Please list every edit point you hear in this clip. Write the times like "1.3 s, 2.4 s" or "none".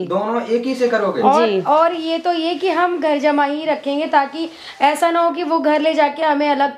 none